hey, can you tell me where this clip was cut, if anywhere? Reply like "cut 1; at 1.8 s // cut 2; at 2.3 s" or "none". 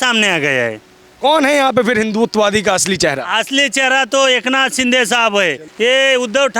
cut 1; at 5.6 s